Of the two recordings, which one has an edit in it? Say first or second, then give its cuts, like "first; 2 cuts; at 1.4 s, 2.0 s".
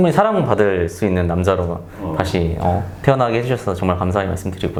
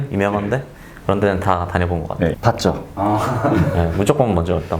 second; 1 cut; at 2.3 s